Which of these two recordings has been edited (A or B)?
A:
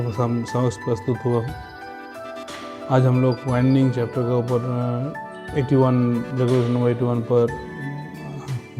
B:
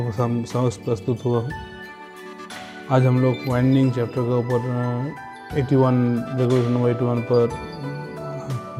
A